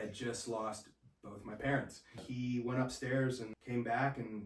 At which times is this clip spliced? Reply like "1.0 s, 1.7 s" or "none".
2.2 s, 3.5 s